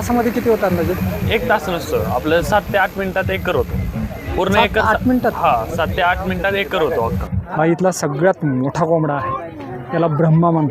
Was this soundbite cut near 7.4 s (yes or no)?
yes